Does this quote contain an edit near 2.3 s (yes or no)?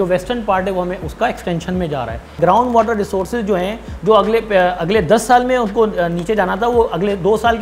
yes